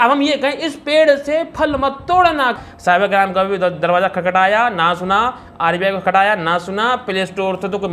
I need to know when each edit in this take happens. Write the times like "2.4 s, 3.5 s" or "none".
2.6 s